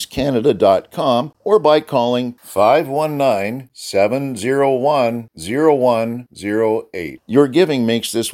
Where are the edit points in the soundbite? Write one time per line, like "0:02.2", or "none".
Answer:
0:01.3